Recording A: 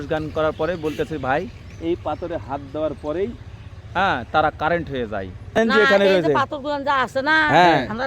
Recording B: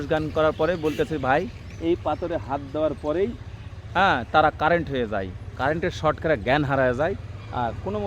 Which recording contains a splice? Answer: A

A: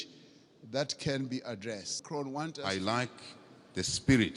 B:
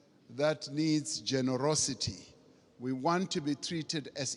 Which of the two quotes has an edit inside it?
A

